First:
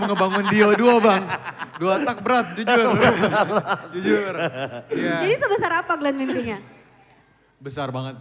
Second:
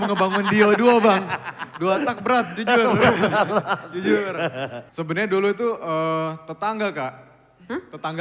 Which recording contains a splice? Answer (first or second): second